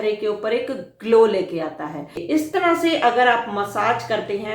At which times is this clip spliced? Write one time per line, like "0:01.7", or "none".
0:02.2

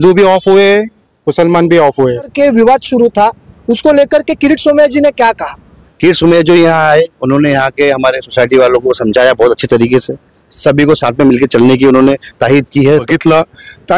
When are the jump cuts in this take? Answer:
0:02.3
0:05.8
0:13.0

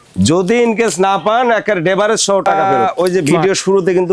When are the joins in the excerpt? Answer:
0:02.5

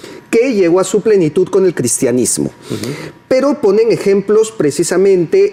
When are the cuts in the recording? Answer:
none

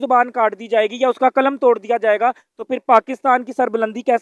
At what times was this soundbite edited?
none

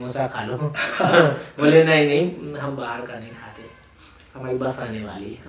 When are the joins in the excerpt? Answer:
none

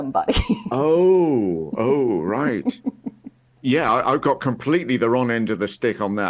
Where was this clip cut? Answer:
0:03.5

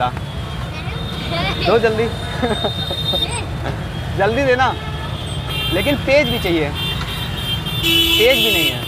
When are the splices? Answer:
none

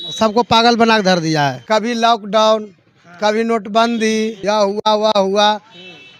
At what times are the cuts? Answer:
0:01.6
0:04.4

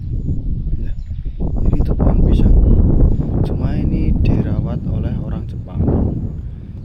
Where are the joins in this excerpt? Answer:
none

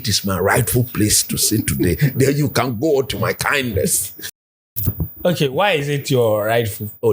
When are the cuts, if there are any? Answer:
0:04.4

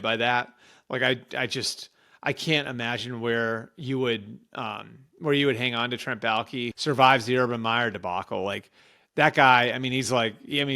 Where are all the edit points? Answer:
0:06.7

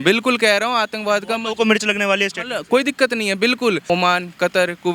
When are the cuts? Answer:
0:03.8

